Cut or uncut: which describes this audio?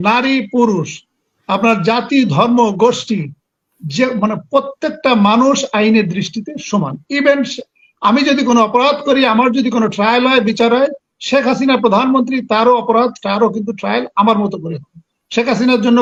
uncut